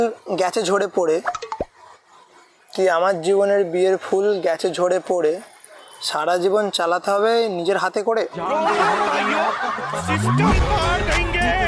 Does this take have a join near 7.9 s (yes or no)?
no